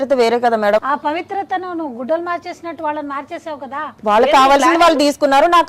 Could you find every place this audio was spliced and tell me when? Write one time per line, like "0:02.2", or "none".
0:00.8
0:03.9